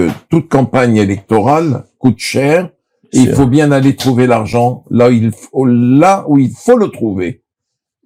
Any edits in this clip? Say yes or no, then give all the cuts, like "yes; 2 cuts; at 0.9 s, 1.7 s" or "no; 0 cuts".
no; 0 cuts